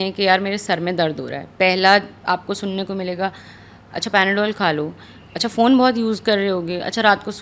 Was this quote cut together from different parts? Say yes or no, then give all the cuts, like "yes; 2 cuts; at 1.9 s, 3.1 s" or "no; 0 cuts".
no; 0 cuts